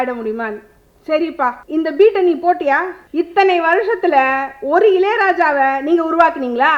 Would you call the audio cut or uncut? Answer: cut